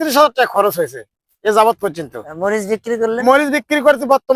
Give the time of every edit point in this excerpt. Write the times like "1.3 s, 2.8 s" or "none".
none